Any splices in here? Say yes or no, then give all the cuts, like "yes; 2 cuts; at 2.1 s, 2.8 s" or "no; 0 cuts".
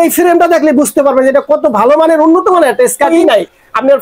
yes; 1 cut; at 3.1 s